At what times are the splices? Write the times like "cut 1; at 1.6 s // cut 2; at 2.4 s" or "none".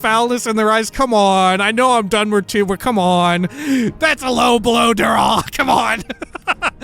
cut 1; at 3.5 s